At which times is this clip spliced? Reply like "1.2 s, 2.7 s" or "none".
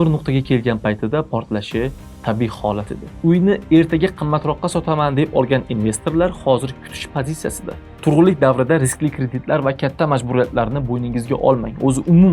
3.0 s, 7.9 s